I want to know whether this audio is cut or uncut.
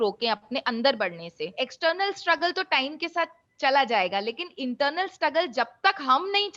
cut